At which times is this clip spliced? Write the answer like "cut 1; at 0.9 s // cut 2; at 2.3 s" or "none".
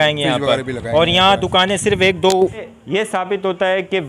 cut 1; at 2.7 s

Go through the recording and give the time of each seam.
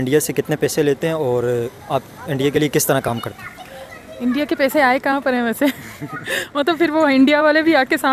none

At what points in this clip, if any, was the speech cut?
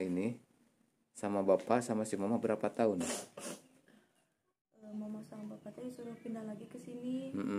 cut 1; at 4.9 s

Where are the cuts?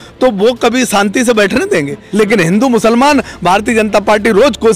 cut 1; at 2.0 s

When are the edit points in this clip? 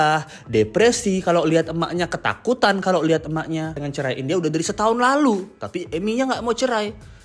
cut 1; at 3.8 s

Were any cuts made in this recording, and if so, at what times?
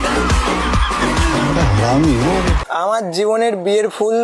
cut 1; at 2.6 s

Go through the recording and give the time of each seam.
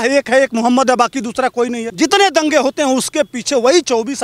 cut 1; at 1.8 s

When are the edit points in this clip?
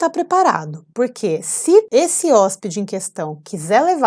cut 1; at 1.9 s

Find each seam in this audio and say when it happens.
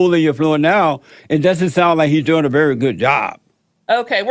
none

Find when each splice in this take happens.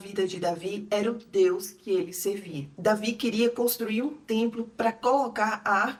none

